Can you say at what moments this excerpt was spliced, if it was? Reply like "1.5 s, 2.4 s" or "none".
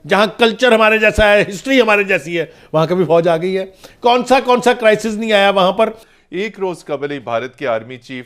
6.0 s